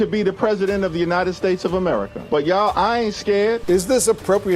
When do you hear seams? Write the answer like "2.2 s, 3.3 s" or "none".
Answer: 3.6 s

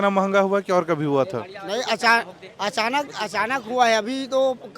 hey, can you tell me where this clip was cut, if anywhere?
none

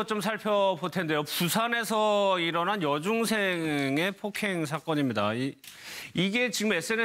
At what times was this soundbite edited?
none

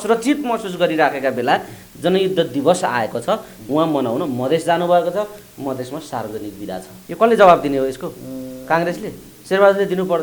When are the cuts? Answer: 7.0 s, 9.3 s

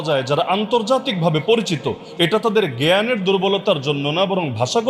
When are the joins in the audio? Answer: none

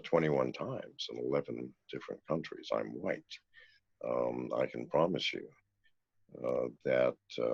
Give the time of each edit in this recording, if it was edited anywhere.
none

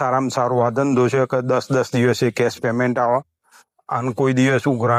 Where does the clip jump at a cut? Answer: none

